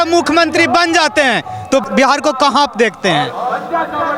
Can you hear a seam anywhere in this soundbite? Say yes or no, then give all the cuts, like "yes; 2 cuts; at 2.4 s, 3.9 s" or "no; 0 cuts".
yes; 1 cut; at 1.8 s